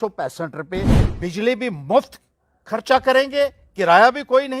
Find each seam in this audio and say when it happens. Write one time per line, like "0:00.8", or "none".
0:01.0